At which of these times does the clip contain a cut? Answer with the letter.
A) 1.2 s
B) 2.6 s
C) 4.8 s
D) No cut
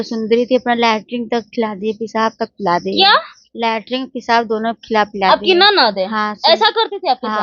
D